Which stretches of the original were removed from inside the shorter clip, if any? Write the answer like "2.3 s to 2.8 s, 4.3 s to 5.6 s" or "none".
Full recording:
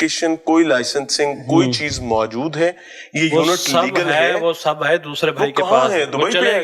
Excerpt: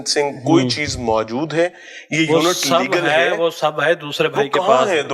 none